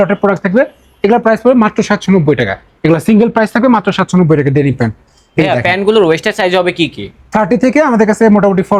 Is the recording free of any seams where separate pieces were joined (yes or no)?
yes